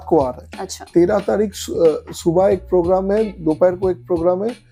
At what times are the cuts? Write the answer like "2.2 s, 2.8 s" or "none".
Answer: none

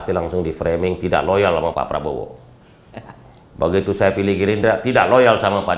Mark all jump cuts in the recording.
1.7 s

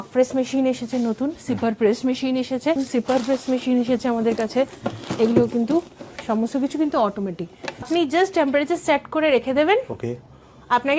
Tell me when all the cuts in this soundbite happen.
2.8 s, 7.9 s

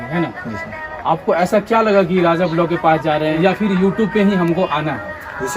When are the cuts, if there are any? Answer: 3.4 s

